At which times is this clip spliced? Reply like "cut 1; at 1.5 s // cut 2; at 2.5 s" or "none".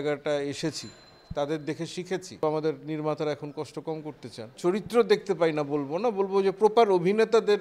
cut 1; at 2.4 s // cut 2; at 4.5 s